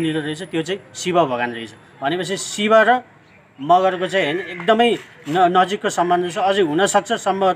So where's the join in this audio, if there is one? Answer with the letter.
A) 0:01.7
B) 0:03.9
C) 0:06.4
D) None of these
D